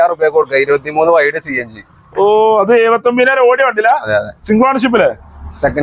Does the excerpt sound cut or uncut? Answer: uncut